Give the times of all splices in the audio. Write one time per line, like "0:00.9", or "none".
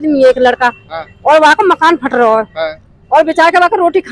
none